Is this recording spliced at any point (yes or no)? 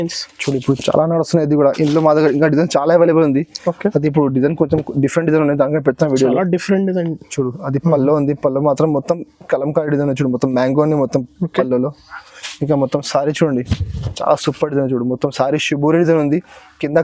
no